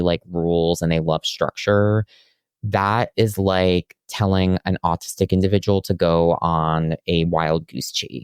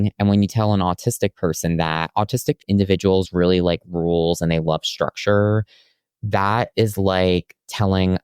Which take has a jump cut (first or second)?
second